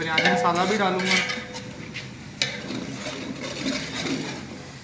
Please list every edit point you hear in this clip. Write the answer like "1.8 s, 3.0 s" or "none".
none